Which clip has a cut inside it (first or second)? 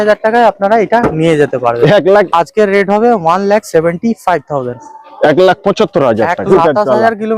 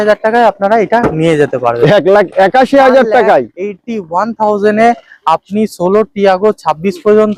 first